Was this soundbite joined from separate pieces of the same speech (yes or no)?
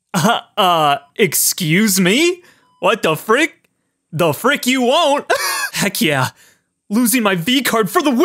yes